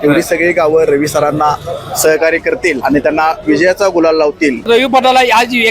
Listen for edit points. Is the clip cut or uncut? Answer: cut